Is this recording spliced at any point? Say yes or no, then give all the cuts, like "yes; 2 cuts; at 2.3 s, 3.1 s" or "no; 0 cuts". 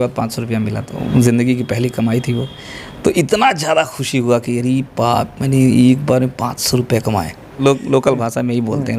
yes; 2 cuts; at 0.9 s, 7.5 s